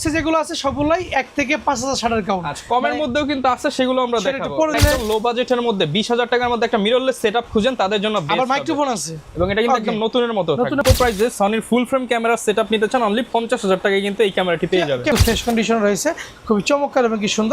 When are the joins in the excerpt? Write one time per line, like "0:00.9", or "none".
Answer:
0:04.8
0:10.8
0:15.1